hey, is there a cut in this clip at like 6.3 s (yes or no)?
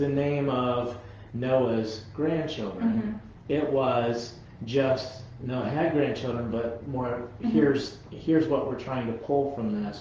no